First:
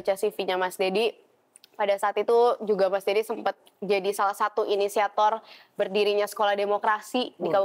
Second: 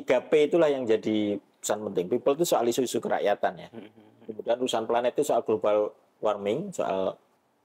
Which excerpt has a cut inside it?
second; 1 cut; at 4.3 s

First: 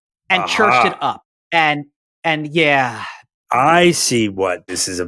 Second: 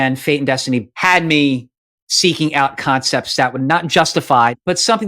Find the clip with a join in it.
second; 1 cut; at 0.9 s

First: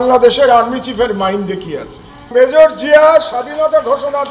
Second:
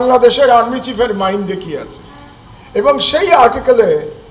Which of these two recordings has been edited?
first; 1 cut; at 2.3 s

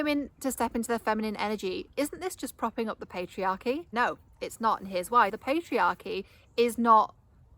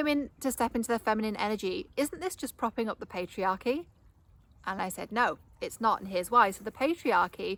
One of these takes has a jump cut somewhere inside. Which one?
first; 2 cuts; at 3.9 s, 5.4 s

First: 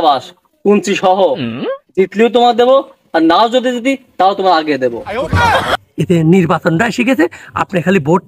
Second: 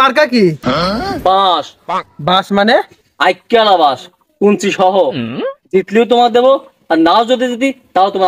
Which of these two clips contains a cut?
first; 1 cut; at 5.7 s

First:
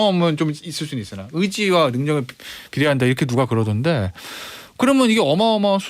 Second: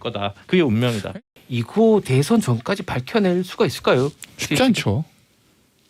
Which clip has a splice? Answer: second; 1 cut; at 1.0 s

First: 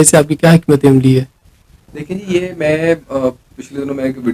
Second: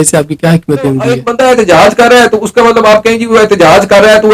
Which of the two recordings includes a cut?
second; 1 cut; at 1.1 s

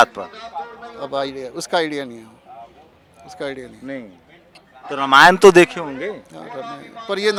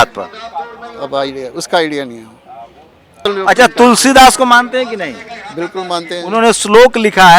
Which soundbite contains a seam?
second; 1 cut; at 3.2 s

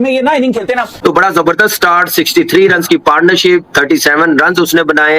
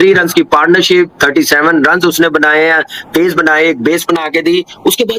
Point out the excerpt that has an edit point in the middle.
first; 1 cut; at 0.9 s

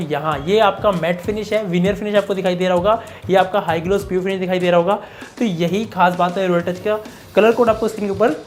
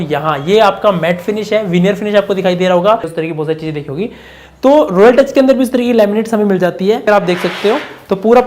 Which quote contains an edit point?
second; 2 cuts; at 3.1 s, 7.1 s

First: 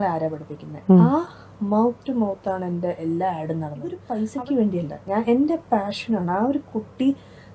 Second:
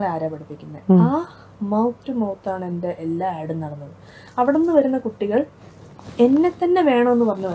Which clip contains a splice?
first; 1 cut; at 4.0 s

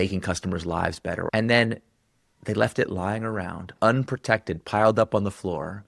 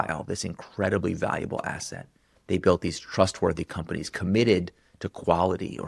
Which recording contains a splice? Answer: first; 1 cut; at 1.3 s

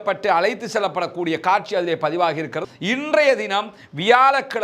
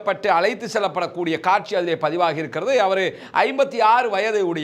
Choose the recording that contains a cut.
first; 1 cut; at 2.6 s

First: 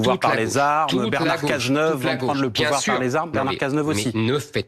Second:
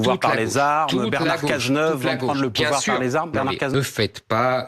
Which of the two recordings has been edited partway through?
second; 1 cut; at 3.7 s

